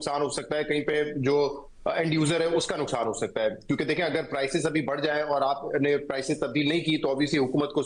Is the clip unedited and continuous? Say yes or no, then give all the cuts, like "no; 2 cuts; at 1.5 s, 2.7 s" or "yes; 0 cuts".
yes; 0 cuts